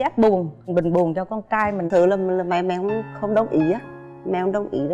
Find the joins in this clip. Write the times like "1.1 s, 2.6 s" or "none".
1.9 s